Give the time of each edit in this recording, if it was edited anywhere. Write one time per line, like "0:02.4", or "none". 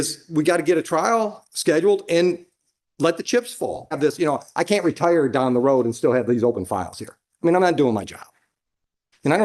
0:04.0